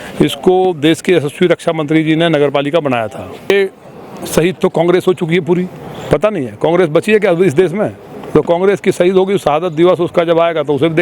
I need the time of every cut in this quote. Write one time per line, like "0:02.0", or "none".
0:03.5